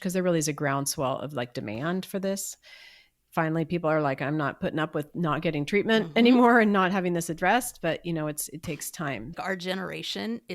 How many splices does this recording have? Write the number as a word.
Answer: one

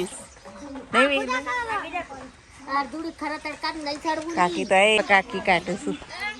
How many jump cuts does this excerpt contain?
one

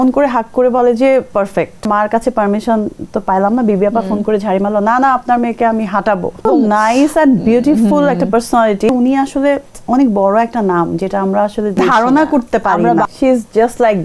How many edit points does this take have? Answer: five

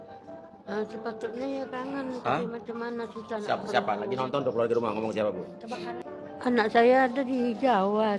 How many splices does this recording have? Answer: one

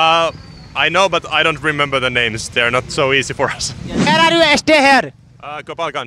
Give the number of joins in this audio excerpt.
one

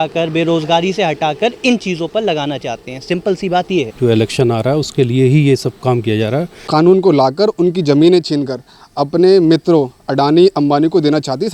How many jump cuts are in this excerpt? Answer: two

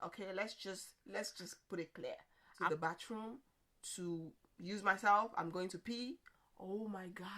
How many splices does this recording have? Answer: one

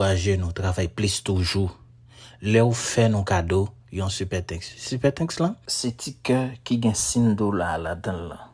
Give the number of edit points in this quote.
zero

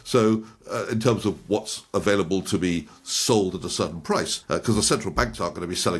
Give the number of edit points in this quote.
one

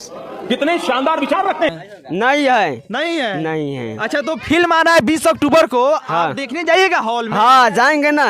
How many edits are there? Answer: one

